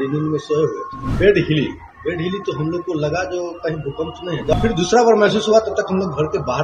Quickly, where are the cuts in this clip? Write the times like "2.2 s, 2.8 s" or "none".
1.0 s, 4.5 s